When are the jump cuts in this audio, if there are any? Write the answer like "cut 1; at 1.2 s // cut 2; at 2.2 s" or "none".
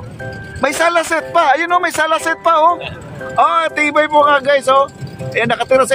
none